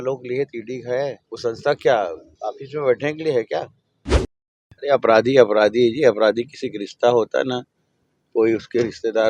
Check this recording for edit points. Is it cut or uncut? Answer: cut